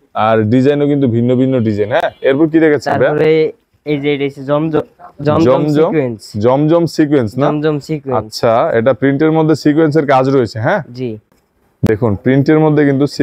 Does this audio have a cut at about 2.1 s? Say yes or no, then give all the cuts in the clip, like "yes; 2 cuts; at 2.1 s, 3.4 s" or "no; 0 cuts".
no; 0 cuts